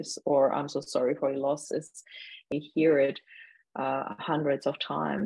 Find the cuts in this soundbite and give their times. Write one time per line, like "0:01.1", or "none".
0:02.5